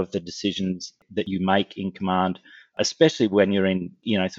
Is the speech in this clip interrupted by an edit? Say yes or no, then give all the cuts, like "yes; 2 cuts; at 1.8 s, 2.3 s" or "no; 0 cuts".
yes; 1 cut; at 1.3 s